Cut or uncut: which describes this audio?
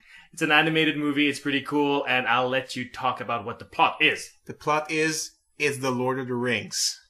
uncut